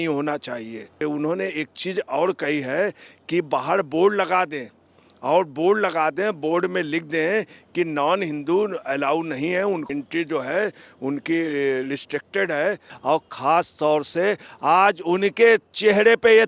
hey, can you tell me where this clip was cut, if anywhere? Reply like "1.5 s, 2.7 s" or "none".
1.0 s, 9.9 s, 12.9 s

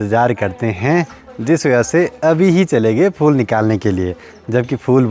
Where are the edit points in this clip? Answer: none

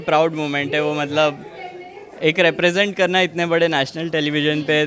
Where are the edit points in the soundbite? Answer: none

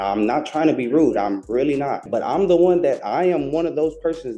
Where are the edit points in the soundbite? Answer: 2.0 s

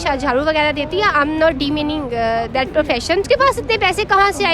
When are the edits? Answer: 3.2 s

